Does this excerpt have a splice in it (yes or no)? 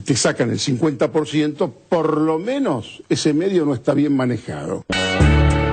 yes